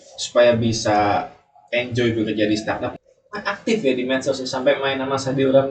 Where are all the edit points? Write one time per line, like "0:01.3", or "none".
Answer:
0:03.0